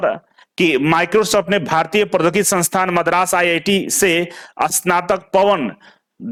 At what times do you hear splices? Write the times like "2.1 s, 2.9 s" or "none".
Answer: none